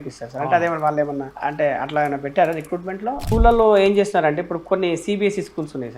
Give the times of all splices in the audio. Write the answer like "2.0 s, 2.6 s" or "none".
1.3 s, 3.2 s